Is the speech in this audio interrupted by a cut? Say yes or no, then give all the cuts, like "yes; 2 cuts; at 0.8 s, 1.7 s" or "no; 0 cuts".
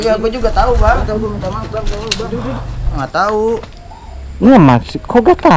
yes; 2 cuts; at 1.1 s, 3.0 s